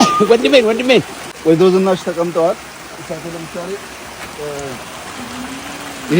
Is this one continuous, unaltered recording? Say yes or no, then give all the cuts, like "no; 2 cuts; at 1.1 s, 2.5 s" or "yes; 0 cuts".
no; 1 cut; at 1.2 s